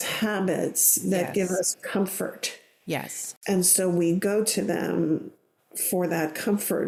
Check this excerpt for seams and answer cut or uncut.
uncut